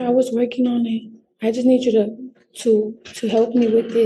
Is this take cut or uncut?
uncut